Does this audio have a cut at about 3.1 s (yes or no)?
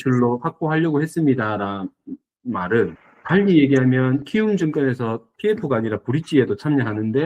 yes